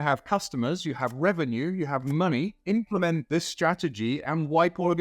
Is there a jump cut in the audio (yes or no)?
yes